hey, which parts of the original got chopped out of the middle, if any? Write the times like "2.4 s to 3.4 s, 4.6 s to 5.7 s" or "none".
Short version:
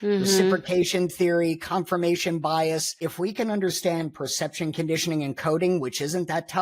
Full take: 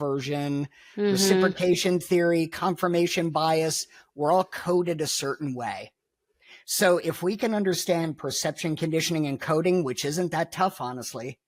3.9 s to 7.0 s